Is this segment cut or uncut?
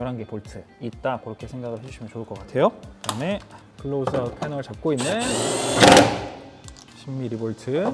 uncut